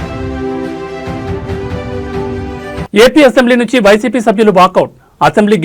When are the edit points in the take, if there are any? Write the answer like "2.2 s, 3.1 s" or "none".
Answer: 2.9 s